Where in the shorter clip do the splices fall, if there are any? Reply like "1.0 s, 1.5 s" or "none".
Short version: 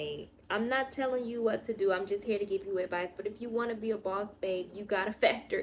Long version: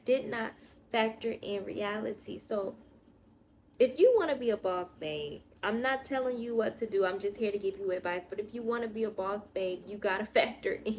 none